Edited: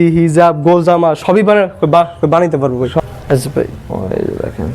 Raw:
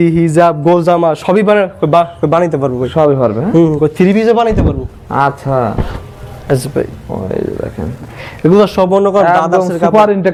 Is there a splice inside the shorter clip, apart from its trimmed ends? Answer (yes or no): yes